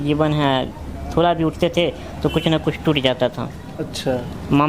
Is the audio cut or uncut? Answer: uncut